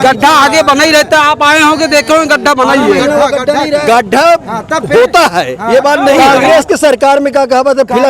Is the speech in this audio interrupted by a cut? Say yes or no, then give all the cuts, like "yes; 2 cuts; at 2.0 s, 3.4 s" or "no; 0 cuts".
yes; 2 cuts; at 3.0 s, 6.2 s